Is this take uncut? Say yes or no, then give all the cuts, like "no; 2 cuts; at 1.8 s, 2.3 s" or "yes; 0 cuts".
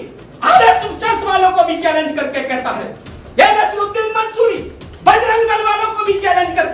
yes; 0 cuts